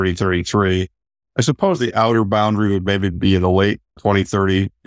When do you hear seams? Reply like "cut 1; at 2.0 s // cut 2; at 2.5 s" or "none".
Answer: cut 1; at 3.9 s